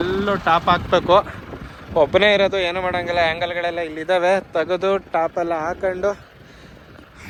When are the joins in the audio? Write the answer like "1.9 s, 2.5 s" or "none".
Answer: none